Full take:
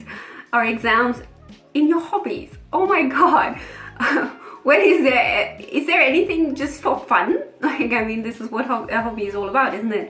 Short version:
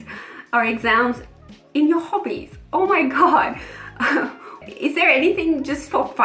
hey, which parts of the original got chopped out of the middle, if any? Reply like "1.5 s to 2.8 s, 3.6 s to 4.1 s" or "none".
4.6 s to 5.5 s